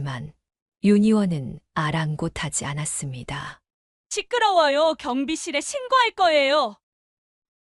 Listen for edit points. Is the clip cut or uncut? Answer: cut